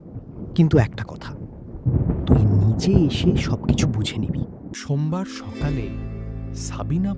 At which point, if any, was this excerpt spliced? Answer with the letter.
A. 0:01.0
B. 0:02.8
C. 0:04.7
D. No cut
C